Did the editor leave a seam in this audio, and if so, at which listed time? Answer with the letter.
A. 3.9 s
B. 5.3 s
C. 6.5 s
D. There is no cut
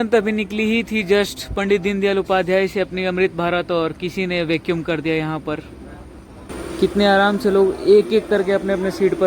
C